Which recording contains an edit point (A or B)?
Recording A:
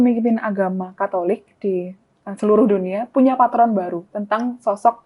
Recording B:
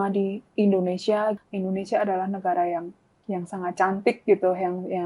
B